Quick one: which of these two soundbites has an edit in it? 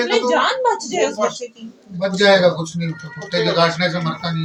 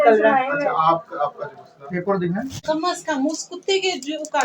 second; 1 cut; at 2.6 s

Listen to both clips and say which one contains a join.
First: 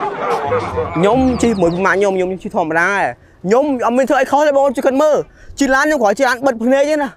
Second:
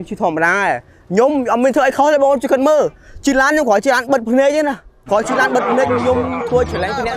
first; 1 cut; at 0.9 s

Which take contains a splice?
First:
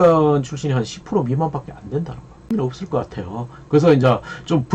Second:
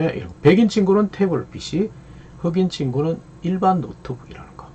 first; 1 cut; at 2.5 s

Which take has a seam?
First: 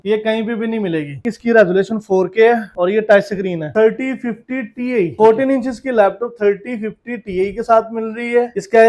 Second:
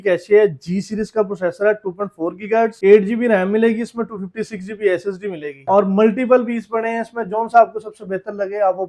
first; 3 cuts; at 1.3 s, 3.7 s, 5.1 s

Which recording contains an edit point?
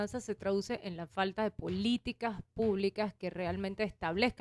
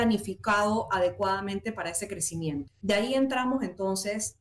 second; 1 cut; at 2.7 s

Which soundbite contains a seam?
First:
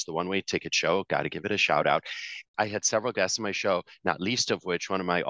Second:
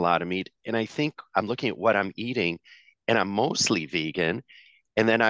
first; 1 cut; at 2.4 s

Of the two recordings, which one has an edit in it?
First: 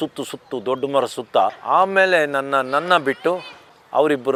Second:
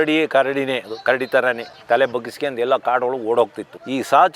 second; 1 cut; at 1.7 s

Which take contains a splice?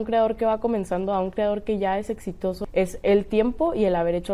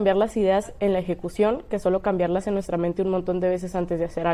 first; 1 cut; at 2.6 s

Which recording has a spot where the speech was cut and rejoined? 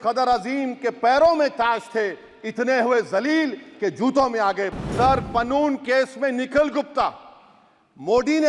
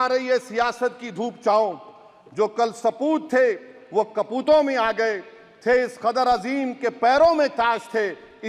first; 1 cut; at 4.7 s

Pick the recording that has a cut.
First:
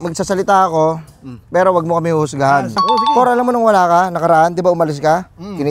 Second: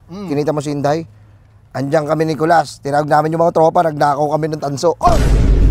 first; 1 cut; at 2.8 s

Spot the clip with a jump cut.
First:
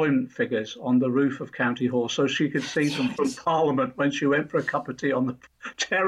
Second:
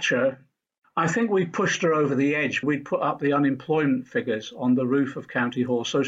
second; 1 cut; at 2.6 s

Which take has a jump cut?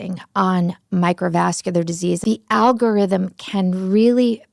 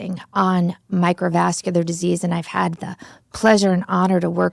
first; 1 cut; at 2.2 s

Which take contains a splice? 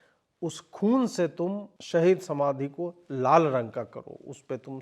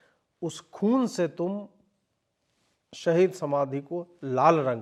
first; 1 cut; at 1.7 s

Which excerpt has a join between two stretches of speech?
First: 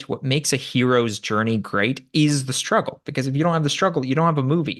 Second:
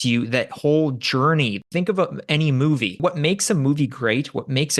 second; 2 cuts; at 1.6 s, 3.0 s

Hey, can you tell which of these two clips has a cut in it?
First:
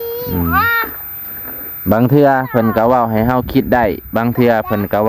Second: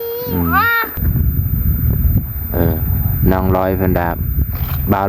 second; 1 cut; at 1.0 s

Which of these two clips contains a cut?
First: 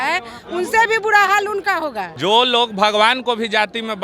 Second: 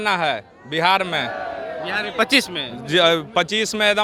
first; 1 cut; at 2.1 s

